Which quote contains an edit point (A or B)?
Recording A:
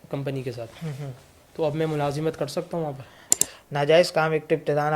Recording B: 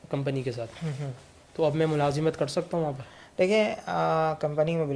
A